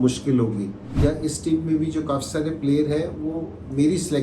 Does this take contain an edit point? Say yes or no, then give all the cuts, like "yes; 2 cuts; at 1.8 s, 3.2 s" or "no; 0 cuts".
yes; 1 cut; at 1.0 s